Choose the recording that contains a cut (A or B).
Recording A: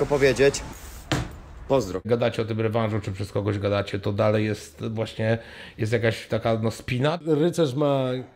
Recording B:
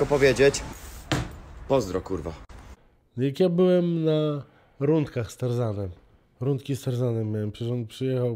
A